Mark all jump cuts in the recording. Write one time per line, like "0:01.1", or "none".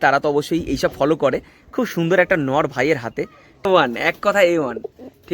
0:03.6